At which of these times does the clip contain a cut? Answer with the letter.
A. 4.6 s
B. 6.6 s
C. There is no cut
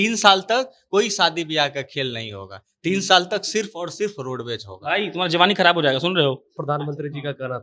B